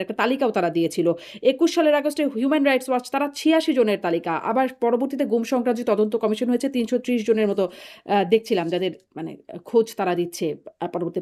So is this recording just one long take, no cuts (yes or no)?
yes